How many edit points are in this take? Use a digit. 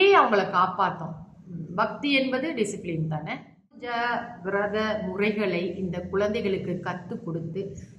1